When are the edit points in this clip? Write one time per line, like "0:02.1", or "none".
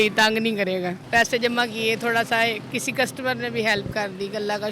0:01.0
0:02.6